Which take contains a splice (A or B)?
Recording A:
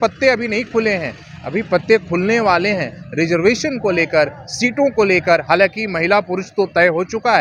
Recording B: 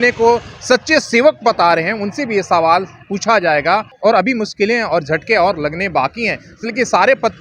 B